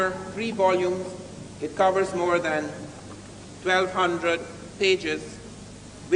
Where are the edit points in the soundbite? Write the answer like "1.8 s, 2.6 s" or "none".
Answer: 4.9 s